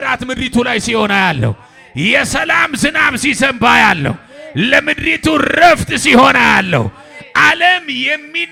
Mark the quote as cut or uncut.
uncut